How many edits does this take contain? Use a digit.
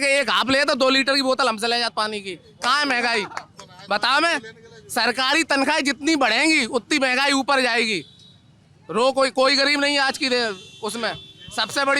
0